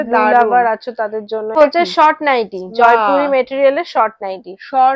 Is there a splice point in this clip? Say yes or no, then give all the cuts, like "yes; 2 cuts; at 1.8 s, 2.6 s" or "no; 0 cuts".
yes; 1 cut; at 1.6 s